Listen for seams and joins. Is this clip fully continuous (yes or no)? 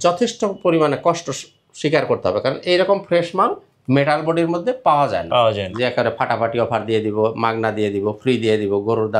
no